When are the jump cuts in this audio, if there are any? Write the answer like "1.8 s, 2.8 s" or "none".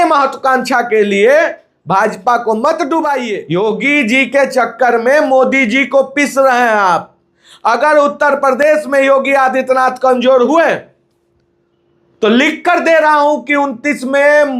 3.3 s